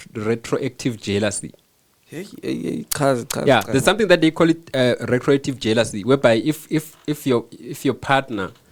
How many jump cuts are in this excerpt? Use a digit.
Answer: 0